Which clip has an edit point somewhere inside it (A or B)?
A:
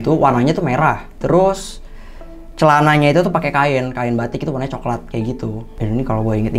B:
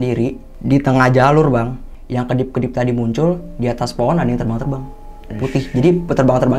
A